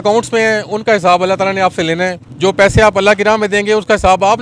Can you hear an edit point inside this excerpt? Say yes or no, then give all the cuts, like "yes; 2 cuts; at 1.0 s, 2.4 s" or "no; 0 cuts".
yes; 1 cut; at 2.2 s